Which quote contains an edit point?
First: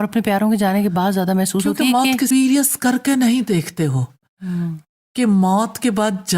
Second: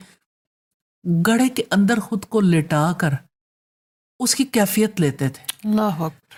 first; 1 cut; at 2.3 s

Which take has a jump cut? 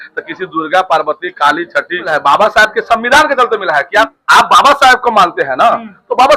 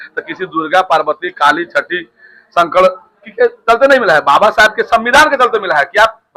first; 2 cuts; at 2.1 s, 4.2 s

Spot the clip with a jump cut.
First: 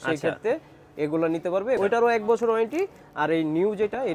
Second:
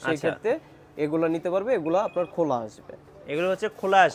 first; 1 cut; at 1.8 s

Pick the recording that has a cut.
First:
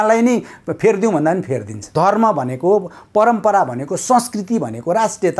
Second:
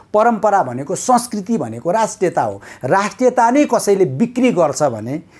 first; 1 cut; at 1.9 s

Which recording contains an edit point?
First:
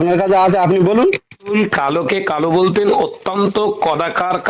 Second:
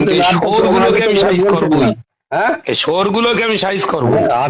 first; 1 cut; at 1.5 s

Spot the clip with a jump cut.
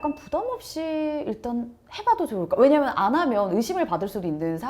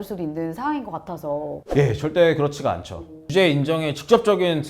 second; 2 cuts; at 1.6 s, 3.3 s

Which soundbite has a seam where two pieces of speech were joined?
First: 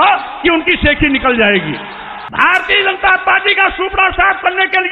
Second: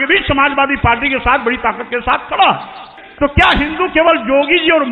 second; 1 cut; at 2.9 s

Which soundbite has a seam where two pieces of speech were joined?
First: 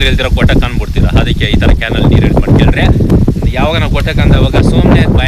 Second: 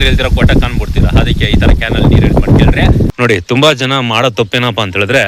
second; 1 cut; at 3.1 s

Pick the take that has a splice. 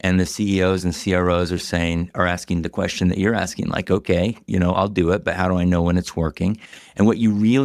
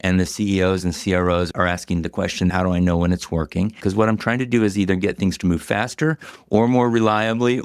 second; 3 cuts; at 1.5 s, 2.5 s, 3.8 s

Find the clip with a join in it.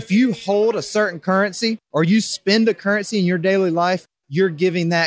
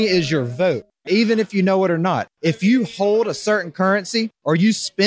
second; 1 cut; at 0.9 s

